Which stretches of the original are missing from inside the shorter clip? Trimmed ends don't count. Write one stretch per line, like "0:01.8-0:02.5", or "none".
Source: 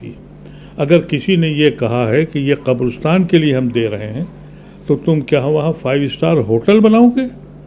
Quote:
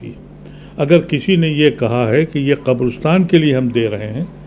none